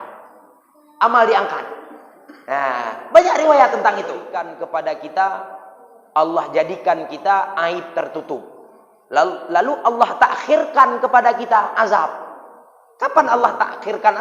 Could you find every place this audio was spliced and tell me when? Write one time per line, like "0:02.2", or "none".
0:04.5